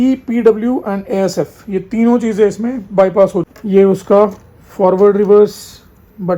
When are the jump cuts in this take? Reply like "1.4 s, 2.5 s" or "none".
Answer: 3.6 s

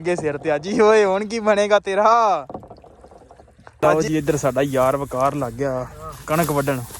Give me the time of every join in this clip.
3.8 s

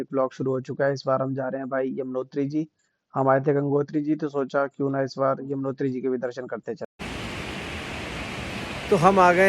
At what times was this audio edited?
7.1 s

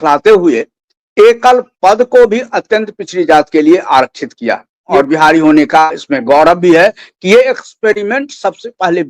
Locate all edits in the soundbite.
4.9 s

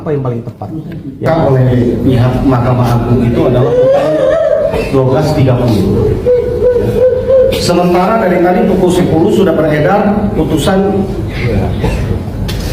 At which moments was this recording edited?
1.2 s

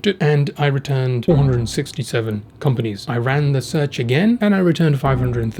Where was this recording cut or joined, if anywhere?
1.2 s, 3.0 s, 4.4 s

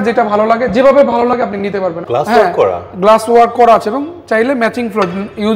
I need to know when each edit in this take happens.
2.0 s

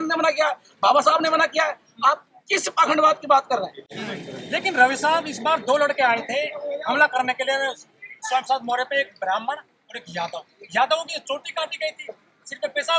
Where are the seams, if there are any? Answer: none

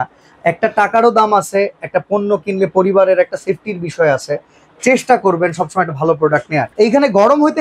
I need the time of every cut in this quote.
6.7 s

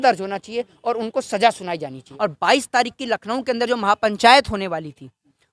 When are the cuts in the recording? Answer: 2.0 s

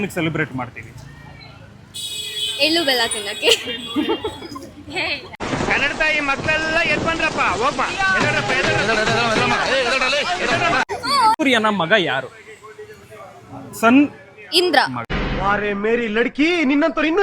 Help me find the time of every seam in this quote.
11.4 s

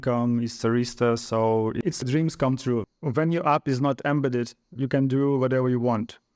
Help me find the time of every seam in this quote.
3.0 s

